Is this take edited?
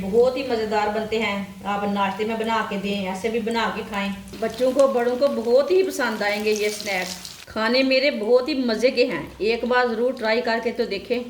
yes; 2 cuts; at 4.2 s, 7.4 s

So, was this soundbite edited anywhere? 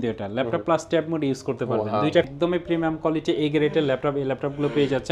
yes; 1 cut; at 2.3 s

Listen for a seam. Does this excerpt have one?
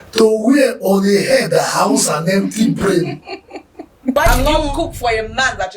yes; 1 cut; at 4.1 s

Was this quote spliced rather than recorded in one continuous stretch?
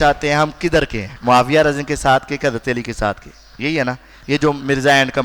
yes; 1 cut; at 1.0 s

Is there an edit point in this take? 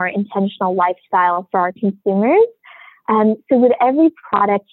no; 0 cuts

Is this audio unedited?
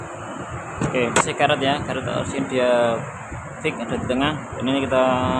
no; 1 cut; at 1.2 s

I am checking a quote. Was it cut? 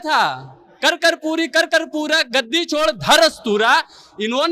no; 0 cuts

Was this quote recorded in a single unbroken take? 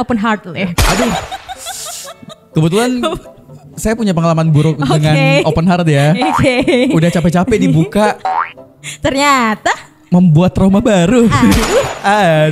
yes; 0 cuts

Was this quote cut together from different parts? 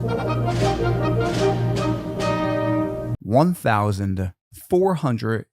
yes; 1 cut; at 3.1 s

